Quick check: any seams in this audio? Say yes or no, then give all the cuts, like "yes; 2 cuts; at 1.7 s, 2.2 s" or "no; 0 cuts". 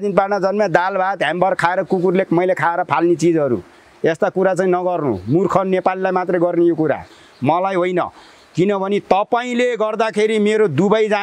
no; 0 cuts